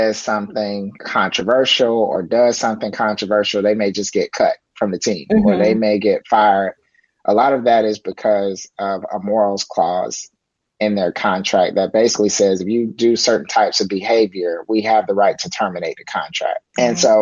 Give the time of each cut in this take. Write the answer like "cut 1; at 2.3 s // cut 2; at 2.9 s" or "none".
cut 1; at 1.0 s